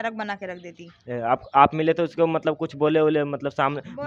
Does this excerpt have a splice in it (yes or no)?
no